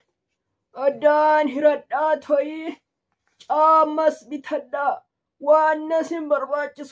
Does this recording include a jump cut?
no; 0 cuts

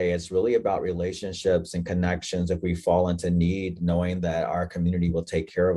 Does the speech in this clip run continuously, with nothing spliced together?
yes; 0 cuts

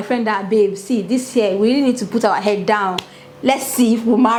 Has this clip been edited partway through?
no; 0 cuts

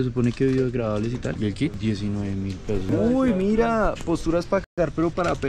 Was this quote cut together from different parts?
yes; 1 cut; at 2.9 s

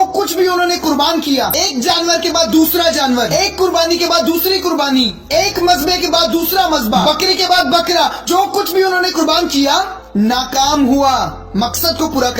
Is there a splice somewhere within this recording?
yes; 1 cut; at 1.5 s

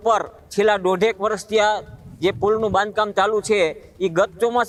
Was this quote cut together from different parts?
no; 0 cuts

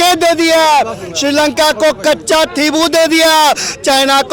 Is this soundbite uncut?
yes; 0 cuts

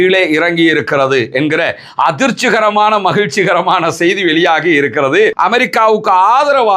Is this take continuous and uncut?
no; 1 cut; at 5.4 s

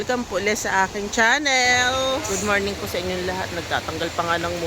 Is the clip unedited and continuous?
no; 1 cut; at 2.2 s

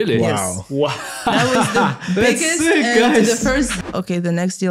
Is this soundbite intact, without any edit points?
no; 1 cut; at 3.7 s

